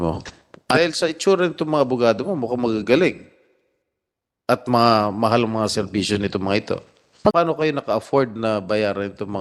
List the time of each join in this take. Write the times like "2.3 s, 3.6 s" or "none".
0.8 s, 7.3 s